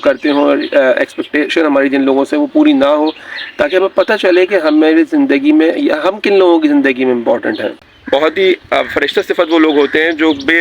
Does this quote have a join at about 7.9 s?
yes; 1 cut; at 7.9 s

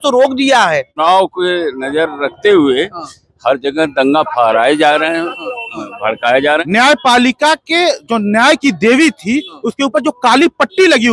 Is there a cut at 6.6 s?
yes; 2 cuts; at 1.0 s, 6.6 s

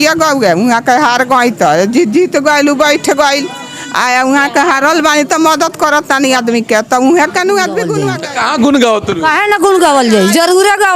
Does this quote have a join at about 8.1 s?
yes; 1 cut; at 8.1 s

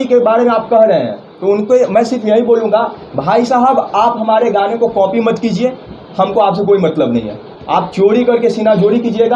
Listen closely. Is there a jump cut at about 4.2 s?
no; 0 cuts

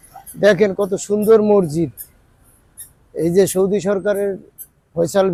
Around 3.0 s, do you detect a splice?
no; 0 cuts

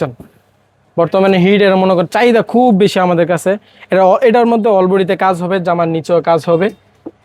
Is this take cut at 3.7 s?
no; 0 cuts

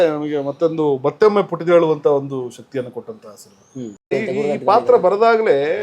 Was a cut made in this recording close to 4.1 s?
yes; 1 cut; at 4.1 s

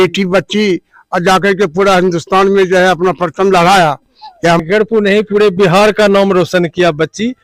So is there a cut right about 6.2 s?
no; 1 cut; at 4.6 s

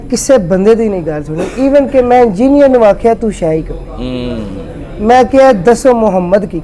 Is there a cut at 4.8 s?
no; 0 cuts

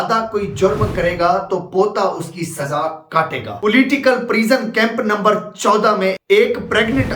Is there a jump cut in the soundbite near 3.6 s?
yes; 1 cut; at 3.6 s

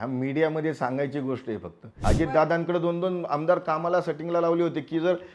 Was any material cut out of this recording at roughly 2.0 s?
yes; 1 cut; at 2.0 s

